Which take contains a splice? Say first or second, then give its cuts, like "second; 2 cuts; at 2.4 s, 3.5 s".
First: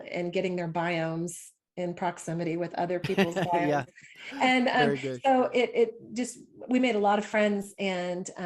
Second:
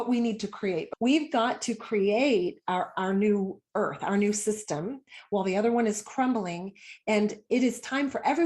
second; 1 cut; at 0.9 s